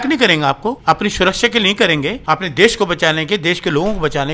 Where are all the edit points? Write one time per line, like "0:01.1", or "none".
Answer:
0:00.8
0:02.2